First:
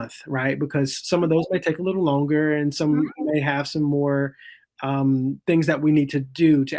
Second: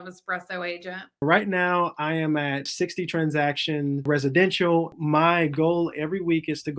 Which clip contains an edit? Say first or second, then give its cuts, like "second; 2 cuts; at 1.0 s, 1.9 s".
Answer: second; 4 cuts; at 1.2 s, 2.7 s, 4.0 s, 5.0 s